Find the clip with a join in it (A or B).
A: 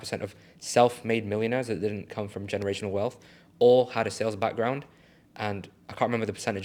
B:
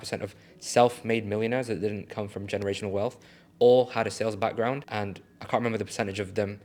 B